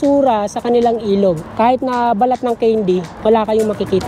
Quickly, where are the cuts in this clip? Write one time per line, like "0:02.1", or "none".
0:01.5
0:03.1